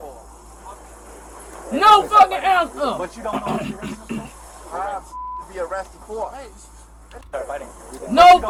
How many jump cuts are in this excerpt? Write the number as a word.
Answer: zero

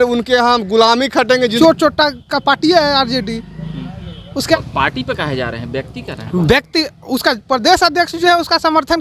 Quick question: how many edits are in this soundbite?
two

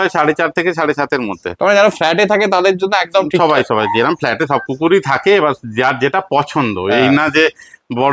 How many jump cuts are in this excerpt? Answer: zero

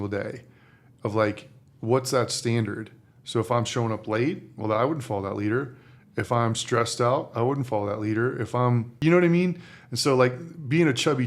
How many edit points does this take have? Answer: one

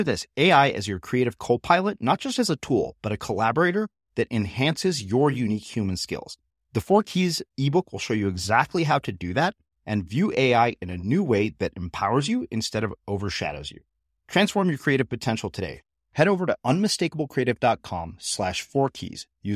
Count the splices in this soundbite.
zero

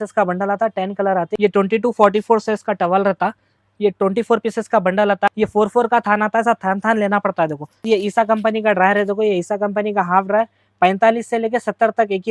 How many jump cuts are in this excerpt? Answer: three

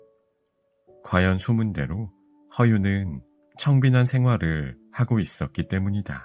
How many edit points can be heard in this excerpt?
one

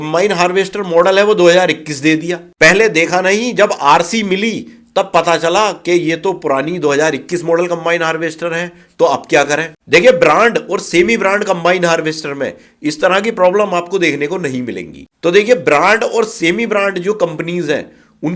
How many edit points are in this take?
one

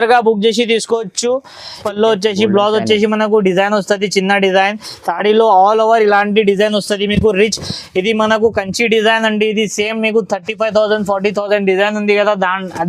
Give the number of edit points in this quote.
one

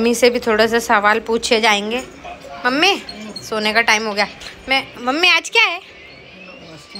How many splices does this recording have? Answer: zero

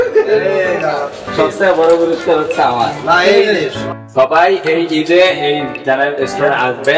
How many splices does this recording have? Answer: one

